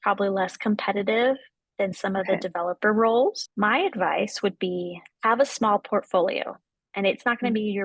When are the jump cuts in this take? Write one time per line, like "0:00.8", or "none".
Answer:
0:03.4